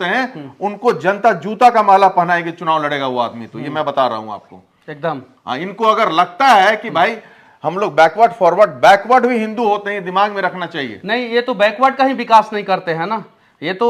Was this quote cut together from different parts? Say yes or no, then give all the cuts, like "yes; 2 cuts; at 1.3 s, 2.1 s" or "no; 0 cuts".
no; 0 cuts